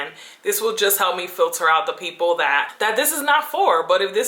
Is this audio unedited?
no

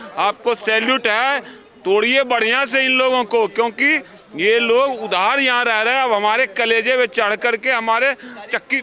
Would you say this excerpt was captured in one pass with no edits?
yes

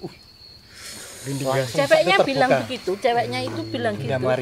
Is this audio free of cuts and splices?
yes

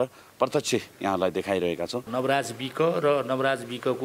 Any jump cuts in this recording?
yes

